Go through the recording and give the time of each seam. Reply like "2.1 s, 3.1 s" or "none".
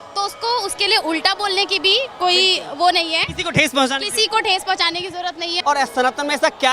5.5 s